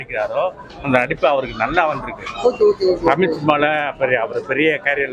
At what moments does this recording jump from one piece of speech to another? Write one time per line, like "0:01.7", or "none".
none